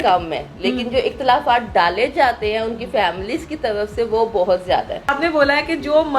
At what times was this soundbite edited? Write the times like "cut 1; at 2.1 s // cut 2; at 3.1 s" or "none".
cut 1; at 5.1 s